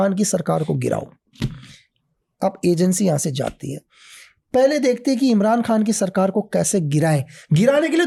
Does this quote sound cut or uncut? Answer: uncut